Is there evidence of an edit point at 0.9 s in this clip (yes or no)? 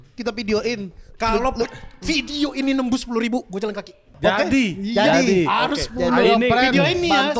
no